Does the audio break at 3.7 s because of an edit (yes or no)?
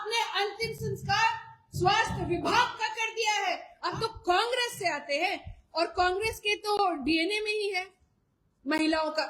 yes